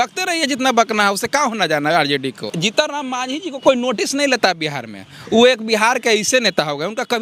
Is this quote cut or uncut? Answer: cut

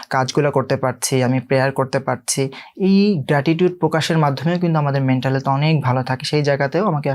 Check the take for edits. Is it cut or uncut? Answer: uncut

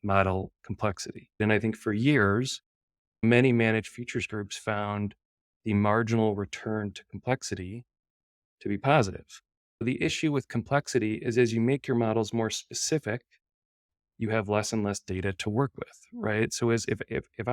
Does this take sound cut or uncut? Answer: cut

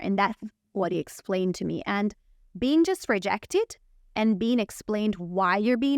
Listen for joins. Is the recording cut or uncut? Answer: uncut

